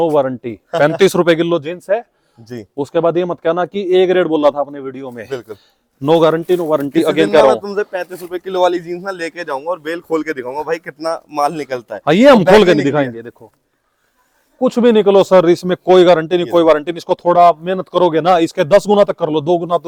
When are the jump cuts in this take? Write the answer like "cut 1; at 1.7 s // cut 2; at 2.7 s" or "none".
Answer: none